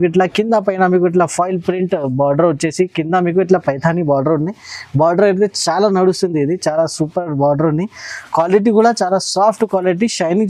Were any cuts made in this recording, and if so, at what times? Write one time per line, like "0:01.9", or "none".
none

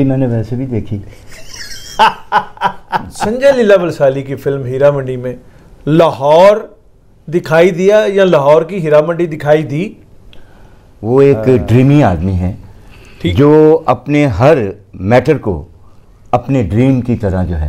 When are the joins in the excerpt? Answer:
0:03.2
0:10.5

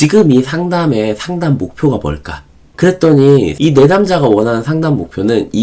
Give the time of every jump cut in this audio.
0:03.5

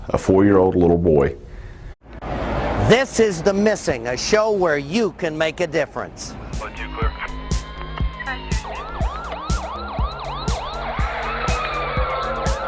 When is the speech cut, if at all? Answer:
none

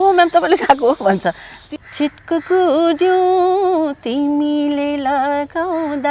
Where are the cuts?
0:01.5

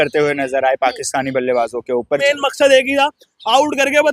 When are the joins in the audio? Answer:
0:02.2

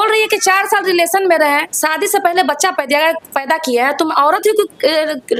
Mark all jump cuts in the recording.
none

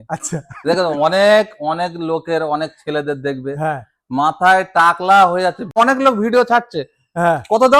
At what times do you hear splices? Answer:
0:05.8

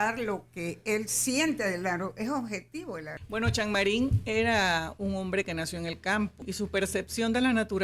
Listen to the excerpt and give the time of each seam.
0:03.2
0:06.4

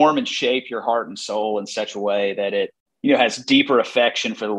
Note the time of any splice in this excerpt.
0:02.8

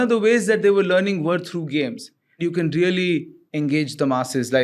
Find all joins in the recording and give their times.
0:02.4

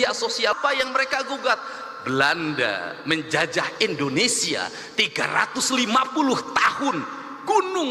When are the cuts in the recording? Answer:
0:01.7

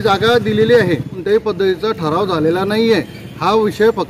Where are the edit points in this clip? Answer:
0:01.1

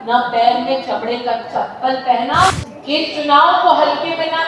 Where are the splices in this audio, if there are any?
0:02.5

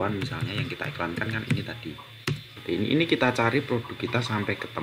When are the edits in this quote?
0:02.5

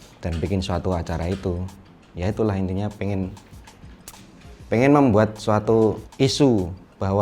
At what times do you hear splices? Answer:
0:06.0

